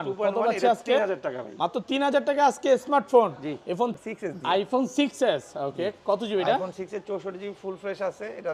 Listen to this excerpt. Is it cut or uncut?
cut